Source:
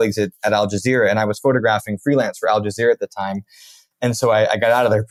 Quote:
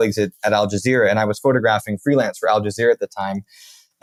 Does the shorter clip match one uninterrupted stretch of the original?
yes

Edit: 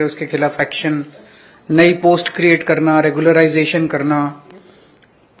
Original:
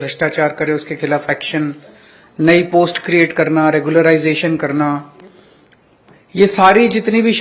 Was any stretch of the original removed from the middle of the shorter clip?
no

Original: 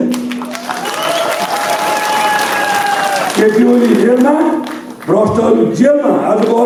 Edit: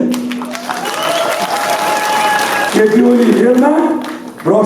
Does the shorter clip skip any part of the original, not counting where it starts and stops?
yes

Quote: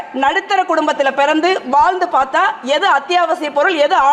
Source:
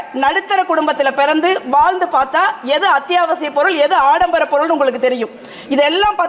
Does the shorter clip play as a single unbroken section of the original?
yes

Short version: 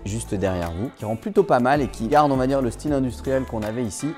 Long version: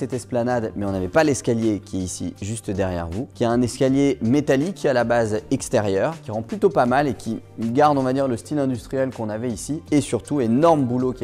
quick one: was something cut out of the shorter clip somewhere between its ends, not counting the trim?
yes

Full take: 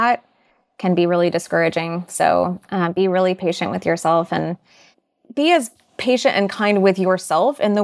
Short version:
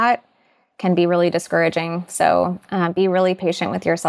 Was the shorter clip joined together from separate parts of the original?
no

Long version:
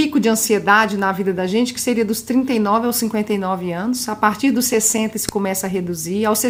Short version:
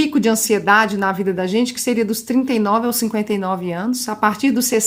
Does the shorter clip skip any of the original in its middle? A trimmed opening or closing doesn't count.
no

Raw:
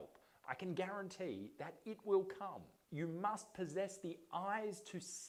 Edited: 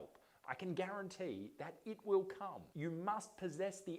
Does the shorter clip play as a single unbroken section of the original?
no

